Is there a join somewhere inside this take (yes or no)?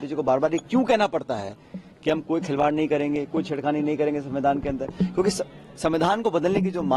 no